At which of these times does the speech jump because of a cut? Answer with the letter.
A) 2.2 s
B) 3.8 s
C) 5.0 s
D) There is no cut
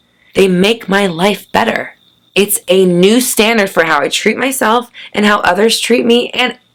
D